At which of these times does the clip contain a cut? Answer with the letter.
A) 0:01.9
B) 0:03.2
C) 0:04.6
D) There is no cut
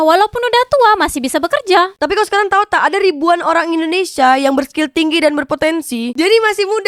D